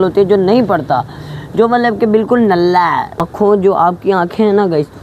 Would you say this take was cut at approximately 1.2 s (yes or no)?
no